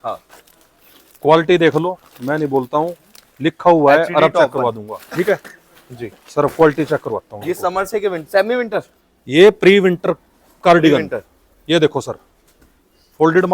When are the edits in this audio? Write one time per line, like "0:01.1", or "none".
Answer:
none